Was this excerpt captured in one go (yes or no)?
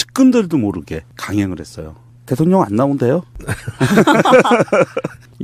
no